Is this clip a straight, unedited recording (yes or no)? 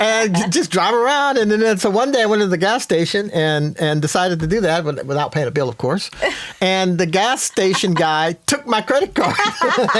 yes